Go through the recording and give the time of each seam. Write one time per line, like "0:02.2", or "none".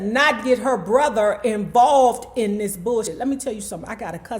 0:03.1